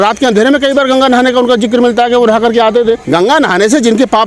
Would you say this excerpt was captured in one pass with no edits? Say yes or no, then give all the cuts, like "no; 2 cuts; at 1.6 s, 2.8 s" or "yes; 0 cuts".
no; 1 cut; at 3.0 s